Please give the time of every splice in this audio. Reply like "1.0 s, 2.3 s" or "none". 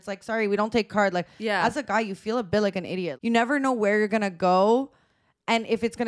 3.1 s